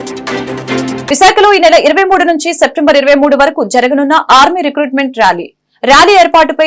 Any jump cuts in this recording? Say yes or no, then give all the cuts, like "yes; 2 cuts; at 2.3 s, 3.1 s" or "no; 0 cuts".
yes; 1 cut; at 1.0 s